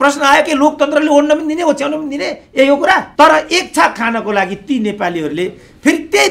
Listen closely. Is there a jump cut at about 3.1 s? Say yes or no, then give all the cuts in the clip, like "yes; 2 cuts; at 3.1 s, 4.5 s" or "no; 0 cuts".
yes; 1 cut; at 3.1 s